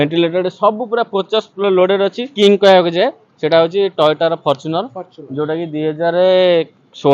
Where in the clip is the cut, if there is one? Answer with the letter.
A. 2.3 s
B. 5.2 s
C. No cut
A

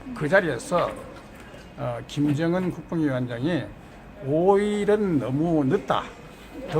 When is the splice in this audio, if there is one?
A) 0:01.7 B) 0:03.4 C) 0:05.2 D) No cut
C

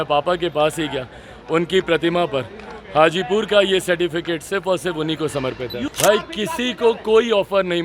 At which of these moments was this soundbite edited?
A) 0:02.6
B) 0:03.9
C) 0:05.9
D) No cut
C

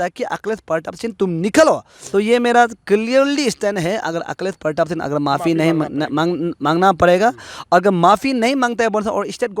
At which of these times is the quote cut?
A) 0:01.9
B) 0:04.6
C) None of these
A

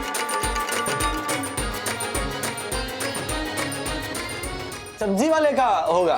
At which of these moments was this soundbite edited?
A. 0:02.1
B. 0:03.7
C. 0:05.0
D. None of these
C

